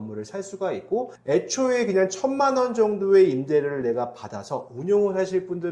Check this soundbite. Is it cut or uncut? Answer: uncut